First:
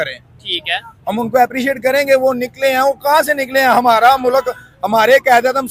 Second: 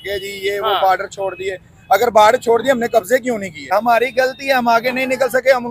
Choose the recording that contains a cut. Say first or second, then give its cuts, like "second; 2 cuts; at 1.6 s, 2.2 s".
second; 1 cut; at 3.7 s